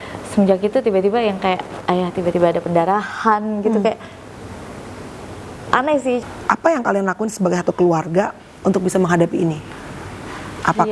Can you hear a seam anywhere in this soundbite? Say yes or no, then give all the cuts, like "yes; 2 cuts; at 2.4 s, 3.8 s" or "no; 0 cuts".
yes; 1 cut; at 6.2 s